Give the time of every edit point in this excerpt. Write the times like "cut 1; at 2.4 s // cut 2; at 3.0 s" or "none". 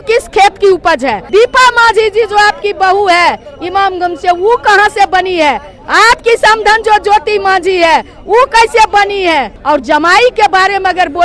cut 1; at 1.2 s // cut 2; at 9.5 s